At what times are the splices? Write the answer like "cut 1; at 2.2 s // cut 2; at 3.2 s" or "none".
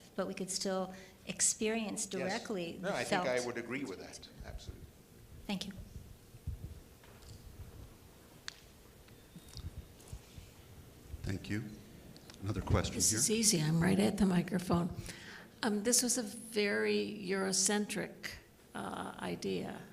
cut 1; at 13.1 s